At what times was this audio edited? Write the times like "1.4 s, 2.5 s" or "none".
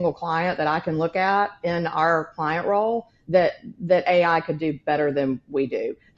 none

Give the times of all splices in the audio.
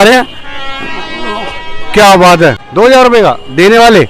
2.6 s

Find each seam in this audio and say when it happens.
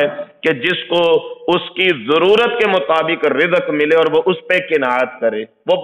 none

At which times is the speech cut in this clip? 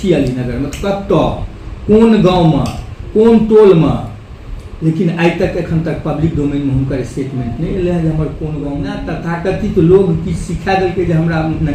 9.2 s

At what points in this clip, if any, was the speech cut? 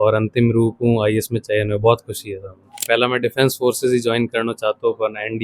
2.8 s

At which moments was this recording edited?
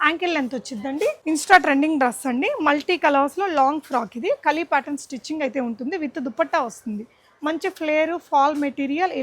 1.2 s

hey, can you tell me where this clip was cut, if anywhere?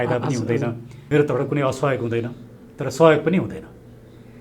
0.9 s

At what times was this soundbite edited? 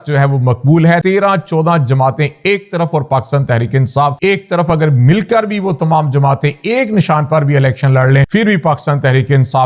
1.0 s, 4.2 s, 8.3 s

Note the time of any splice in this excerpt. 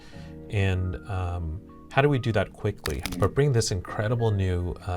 3.0 s

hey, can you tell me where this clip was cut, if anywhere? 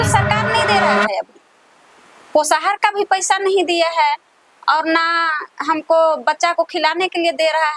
none

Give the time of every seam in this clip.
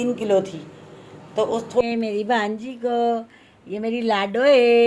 1.8 s

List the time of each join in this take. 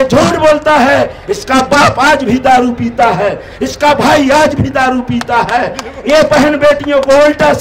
none

